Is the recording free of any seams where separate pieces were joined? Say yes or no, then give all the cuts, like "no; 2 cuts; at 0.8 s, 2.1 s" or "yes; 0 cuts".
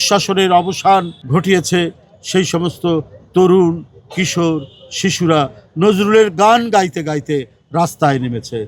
no; 1 cut; at 1.2 s